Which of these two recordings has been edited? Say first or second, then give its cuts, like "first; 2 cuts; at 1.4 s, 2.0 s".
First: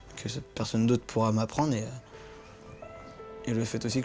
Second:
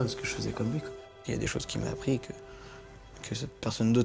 second; 1 cut; at 1.0 s